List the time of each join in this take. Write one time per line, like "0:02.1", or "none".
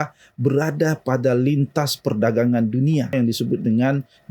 0:03.1